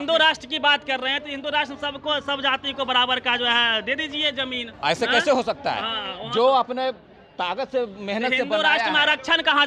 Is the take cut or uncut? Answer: cut